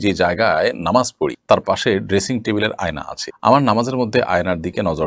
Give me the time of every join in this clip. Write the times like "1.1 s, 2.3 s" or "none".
none